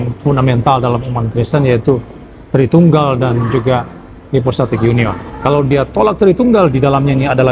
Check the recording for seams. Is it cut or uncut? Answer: cut